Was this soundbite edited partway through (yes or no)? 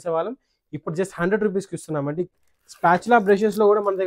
yes